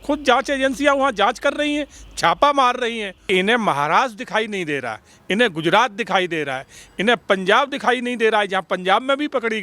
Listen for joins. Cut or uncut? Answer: cut